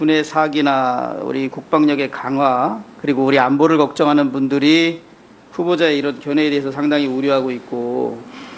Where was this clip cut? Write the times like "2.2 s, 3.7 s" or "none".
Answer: 5.5 s